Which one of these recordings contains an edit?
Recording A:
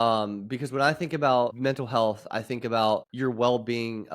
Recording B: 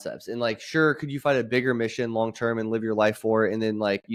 A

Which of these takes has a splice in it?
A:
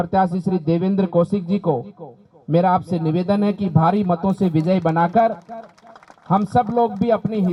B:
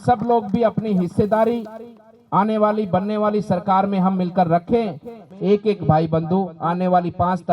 B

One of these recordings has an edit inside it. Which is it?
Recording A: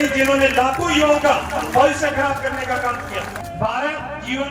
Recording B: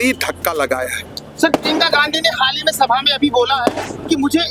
A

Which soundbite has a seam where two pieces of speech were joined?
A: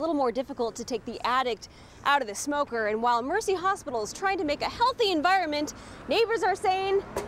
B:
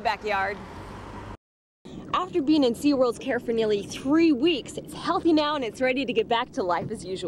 B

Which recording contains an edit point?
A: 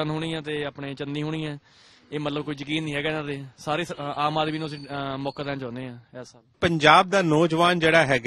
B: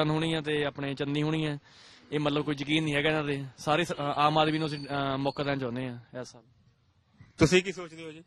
A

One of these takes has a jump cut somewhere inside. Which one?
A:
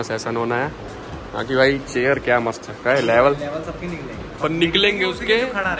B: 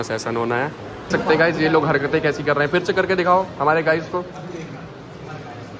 B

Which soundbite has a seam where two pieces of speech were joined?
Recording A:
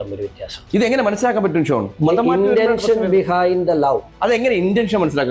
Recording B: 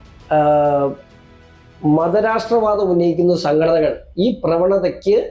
A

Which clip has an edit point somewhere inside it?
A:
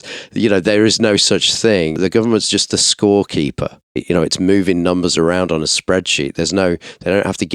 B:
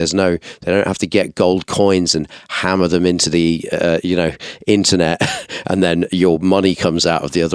A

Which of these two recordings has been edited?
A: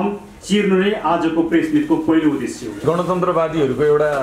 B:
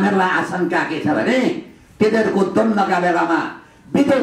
A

